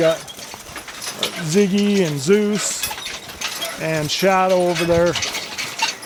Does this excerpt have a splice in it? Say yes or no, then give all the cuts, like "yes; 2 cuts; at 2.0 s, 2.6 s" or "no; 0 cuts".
no; 0 cuts